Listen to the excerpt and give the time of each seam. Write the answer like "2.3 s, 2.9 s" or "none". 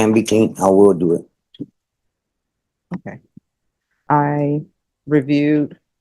4.0 s